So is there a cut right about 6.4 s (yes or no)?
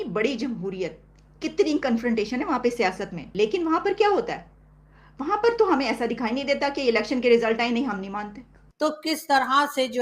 no